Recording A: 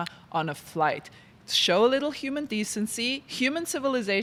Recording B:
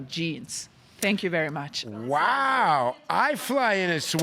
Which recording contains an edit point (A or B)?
B